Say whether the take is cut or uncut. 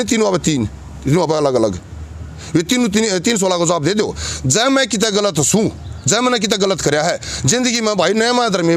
uncut